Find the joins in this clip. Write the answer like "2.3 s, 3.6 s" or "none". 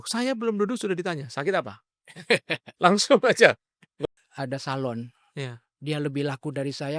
3.8 s

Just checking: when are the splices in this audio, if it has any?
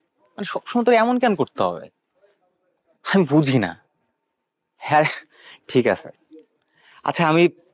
none

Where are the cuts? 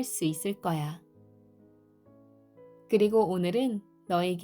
1.0 s, 2.9 s

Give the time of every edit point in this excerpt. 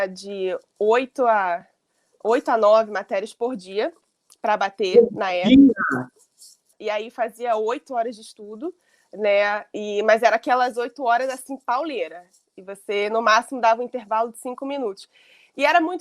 6.7 s

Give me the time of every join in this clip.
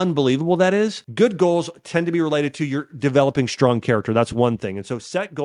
1.0 s

